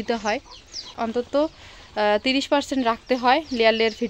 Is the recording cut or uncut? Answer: cut